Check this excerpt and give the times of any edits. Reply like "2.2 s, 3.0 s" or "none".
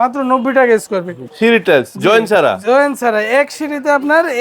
1.2 s